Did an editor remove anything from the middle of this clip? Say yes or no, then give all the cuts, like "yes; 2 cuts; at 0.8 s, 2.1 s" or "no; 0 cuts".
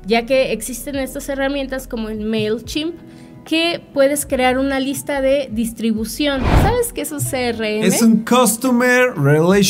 yes; 1 cut; at 6.5 s